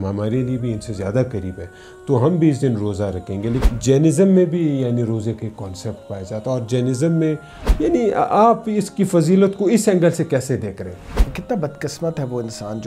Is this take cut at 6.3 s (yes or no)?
no